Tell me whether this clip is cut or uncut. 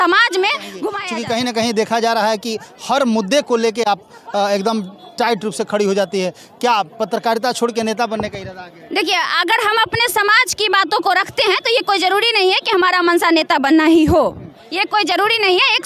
cut